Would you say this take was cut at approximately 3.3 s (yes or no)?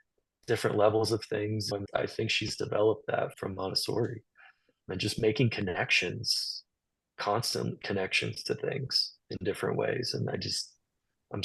yes